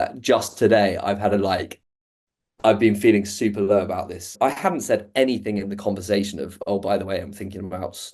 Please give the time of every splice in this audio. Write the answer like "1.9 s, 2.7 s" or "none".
4.3 s